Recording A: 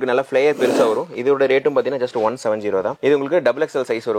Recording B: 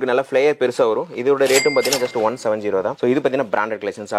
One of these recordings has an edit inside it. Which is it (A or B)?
B